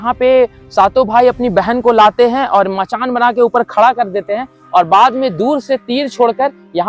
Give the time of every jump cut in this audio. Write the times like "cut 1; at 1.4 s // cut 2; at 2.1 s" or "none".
none